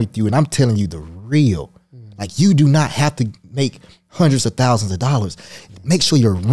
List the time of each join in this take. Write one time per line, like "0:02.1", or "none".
none